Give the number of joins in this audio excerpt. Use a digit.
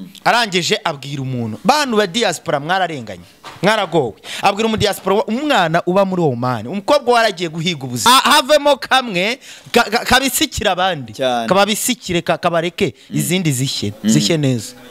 1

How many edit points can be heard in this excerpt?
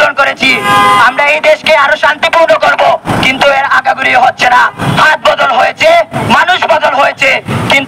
0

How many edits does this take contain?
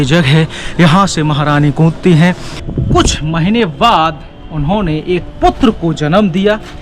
1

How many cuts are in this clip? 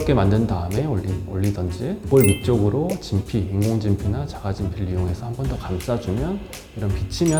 0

